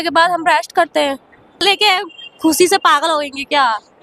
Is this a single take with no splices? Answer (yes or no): no